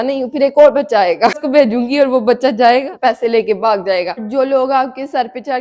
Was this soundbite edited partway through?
yes; 3 cuts; at 1.4 s, 2.9 s, 4.2 s

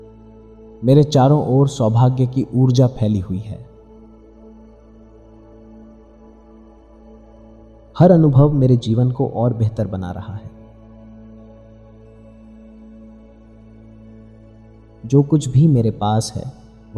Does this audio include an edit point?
no; 0 cuts

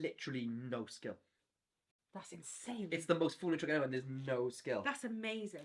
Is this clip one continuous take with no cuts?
yes; 0 cuts

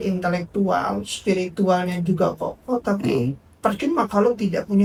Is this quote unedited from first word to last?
yes; 0 cuts

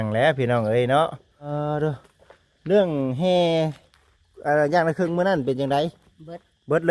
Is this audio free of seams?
no; 1 cut; at 1.5 s

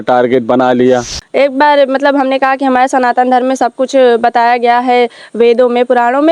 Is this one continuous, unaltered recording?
no; 1 cut; at 1.2 s

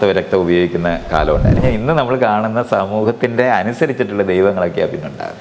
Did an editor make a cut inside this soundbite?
yes; 1 cut; at 1.6 s

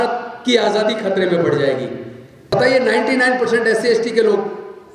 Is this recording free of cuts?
no; 1 cut; at 2.5 s

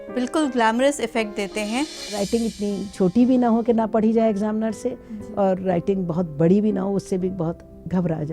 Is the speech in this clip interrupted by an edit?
yes; 1 cut; at 2.2 s

